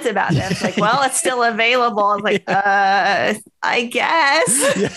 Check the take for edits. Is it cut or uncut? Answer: uncut